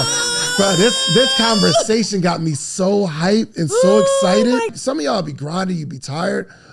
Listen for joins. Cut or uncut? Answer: cut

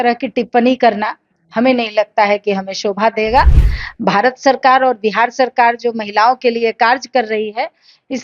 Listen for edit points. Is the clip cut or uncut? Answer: cut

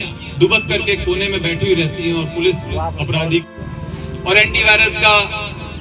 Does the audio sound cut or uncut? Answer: cut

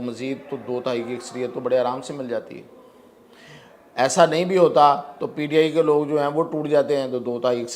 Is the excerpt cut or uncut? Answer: uncut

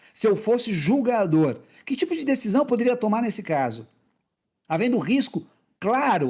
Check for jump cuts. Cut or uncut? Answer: uncut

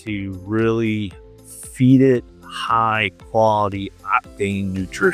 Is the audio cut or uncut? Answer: uncut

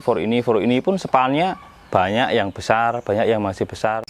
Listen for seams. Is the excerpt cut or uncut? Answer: uncut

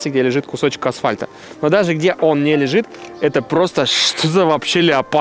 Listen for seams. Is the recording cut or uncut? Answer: uncut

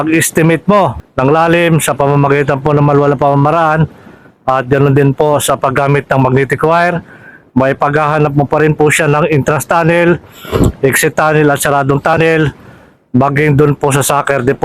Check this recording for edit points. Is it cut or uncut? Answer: cut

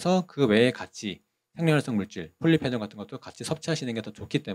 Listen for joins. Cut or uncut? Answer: uncut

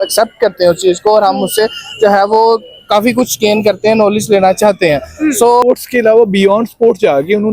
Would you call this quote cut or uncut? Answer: cut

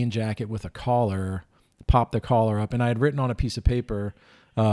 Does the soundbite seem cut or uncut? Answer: uncut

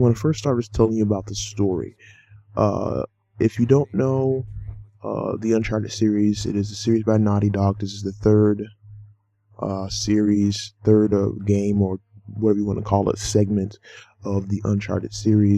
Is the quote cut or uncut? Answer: cut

